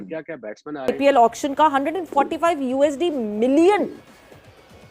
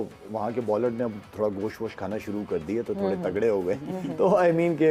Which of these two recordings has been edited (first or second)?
first